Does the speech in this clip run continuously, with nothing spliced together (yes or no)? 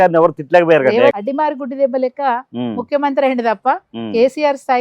no